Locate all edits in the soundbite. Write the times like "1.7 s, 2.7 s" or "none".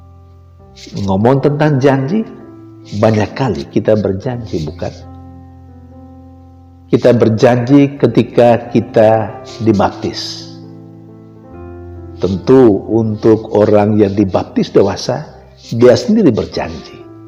none